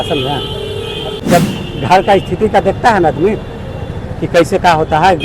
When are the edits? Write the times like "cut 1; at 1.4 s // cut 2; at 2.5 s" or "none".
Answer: cut 1; at 1.2 s